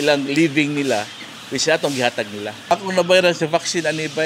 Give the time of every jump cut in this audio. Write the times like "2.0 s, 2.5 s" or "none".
2.7 s